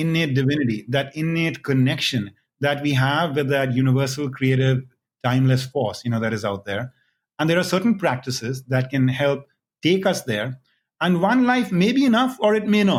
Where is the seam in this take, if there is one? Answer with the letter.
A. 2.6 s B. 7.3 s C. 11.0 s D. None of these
D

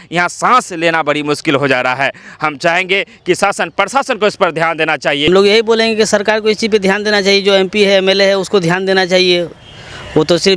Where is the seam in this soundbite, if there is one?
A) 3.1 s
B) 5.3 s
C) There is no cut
B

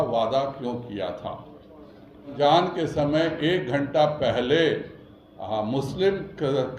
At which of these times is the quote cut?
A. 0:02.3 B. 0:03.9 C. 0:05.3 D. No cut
A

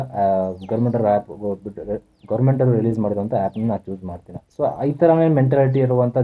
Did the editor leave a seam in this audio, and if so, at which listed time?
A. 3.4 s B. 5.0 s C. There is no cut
C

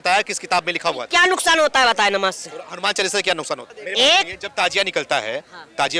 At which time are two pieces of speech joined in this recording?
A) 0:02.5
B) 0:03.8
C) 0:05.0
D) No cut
B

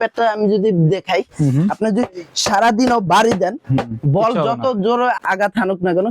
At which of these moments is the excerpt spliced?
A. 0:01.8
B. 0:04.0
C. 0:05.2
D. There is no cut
C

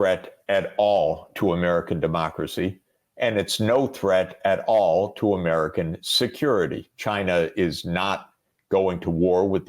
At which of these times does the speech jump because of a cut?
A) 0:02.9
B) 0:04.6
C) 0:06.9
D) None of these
C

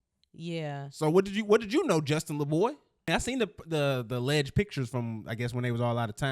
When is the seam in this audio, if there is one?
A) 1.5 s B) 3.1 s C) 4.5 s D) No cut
B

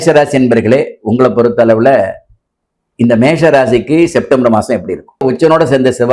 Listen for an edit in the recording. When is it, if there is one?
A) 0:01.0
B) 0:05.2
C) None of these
B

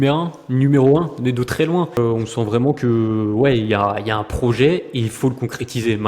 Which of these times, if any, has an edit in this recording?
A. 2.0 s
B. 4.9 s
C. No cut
A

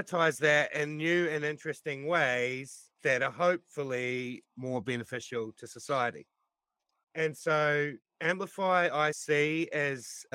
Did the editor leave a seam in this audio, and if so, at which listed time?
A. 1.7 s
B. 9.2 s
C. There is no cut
B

